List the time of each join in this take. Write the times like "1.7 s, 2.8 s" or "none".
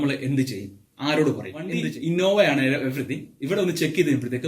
1.8 s